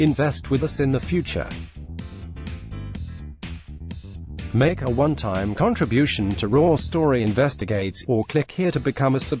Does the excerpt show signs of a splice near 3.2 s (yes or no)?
yes